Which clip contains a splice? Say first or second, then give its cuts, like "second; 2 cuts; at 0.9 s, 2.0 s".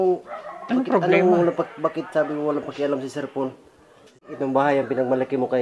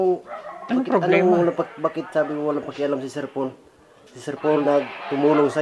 first; 1 cut; at 4.3 s